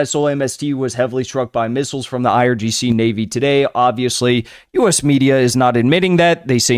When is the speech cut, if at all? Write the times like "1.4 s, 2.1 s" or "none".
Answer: none